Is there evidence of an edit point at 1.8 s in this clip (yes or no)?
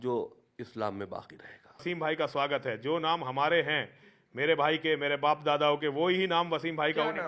yes